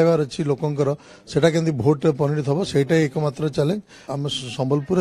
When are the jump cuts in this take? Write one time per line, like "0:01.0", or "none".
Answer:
0:04.1